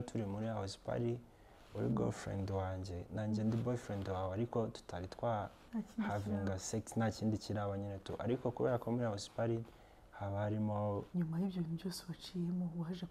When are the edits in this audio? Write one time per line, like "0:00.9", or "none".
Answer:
0:11.1

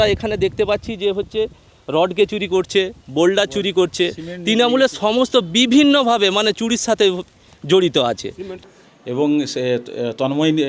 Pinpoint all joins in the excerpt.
0:08.6

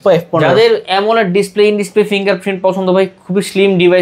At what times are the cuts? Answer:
none

